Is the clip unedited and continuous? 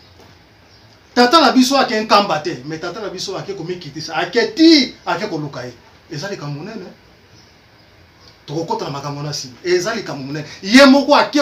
yes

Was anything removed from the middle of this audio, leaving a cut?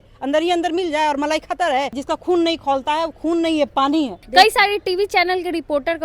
yes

